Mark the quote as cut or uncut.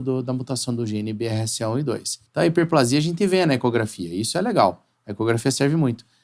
cut